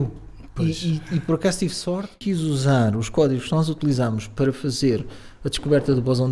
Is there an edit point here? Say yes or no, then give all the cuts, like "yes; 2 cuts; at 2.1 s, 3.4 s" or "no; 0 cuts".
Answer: yes; 1 cut; at 2.1 s